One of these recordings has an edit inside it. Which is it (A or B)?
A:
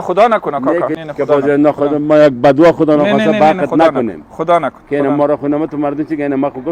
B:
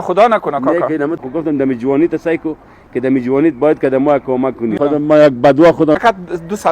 B